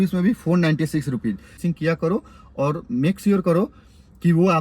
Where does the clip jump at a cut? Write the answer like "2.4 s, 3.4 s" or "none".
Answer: 1.6 s